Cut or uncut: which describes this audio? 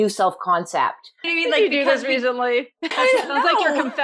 cut